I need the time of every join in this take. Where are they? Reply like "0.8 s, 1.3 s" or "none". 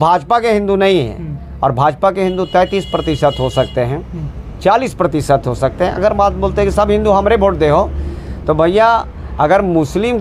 none